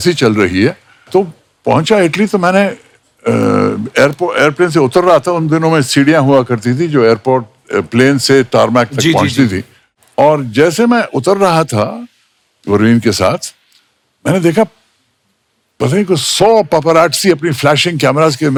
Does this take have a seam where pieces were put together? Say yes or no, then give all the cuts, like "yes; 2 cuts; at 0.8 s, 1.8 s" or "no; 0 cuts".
no; 0 cuts